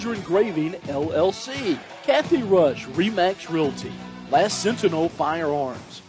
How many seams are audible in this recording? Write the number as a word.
one